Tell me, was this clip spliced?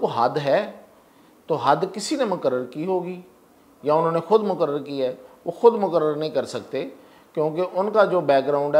no; 0 cuts

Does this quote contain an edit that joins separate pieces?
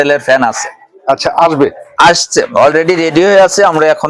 no; 0 cuts

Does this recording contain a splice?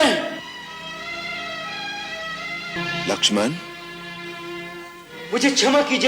yes; 1 cut; at 2.8 s

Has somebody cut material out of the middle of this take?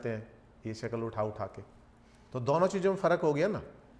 no; 0 cuts

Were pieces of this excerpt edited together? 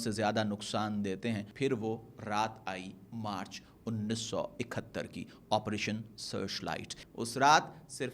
yes; 2 cuts; at 1.5 s, 7.0 s

